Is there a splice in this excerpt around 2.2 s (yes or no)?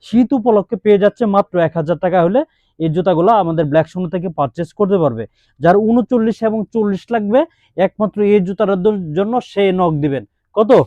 no